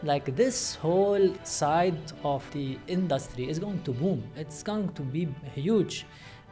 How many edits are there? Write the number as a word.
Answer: two